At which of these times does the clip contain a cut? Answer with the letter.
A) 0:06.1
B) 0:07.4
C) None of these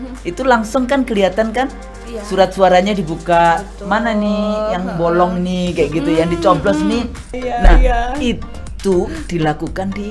B